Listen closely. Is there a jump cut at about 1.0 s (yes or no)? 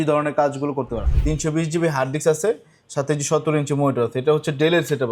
yes